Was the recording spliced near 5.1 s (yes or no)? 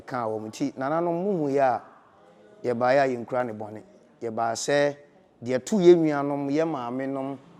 no